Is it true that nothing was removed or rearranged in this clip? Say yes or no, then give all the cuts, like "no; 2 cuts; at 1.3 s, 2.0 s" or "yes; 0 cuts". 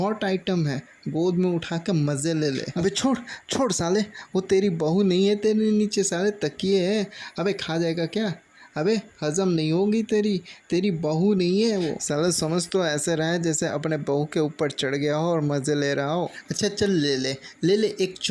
no; 1 cut; at 2.7 s